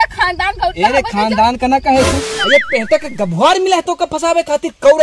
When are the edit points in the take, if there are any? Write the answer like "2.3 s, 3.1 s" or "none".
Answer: 2.3 s

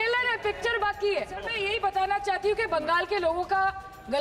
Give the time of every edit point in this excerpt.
1.5 s

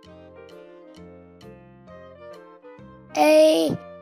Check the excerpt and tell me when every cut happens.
3.1 s

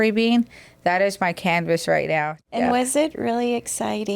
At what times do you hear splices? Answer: 2.4 s

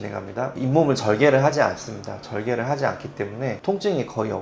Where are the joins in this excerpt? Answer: none

